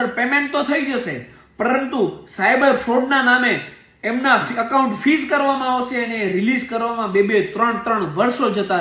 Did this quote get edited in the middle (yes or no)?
no